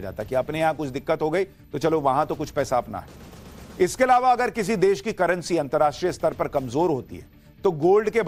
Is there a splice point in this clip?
no; 0 cuts

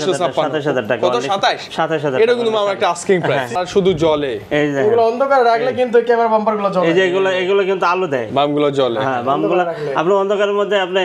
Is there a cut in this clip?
yes; 1 cut; at 3.6 s

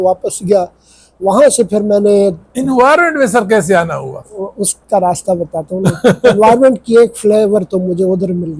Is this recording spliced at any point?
no; 0 cuts

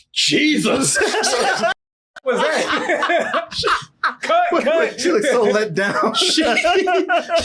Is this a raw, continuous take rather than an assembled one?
yes; 0 cuts

